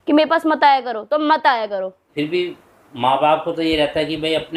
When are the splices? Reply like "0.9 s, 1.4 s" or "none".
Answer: 2.1 s